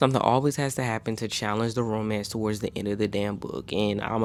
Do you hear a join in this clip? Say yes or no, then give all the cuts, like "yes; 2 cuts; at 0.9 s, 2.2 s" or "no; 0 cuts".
no; 0 cuts